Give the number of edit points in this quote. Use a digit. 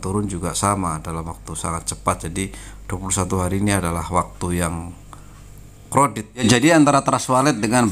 1